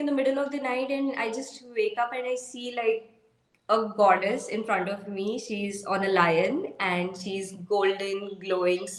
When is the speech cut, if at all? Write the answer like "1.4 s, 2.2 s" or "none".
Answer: none